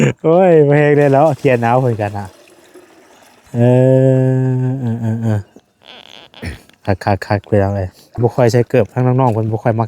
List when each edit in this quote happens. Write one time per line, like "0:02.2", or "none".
0:08.1